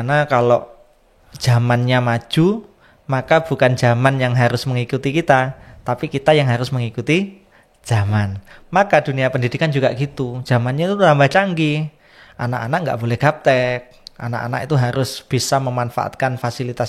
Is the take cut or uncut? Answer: uncut